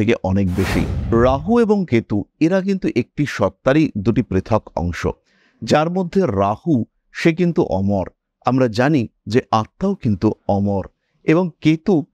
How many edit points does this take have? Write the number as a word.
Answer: one